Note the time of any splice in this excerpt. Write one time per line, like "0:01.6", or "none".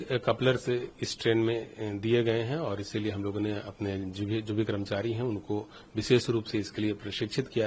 none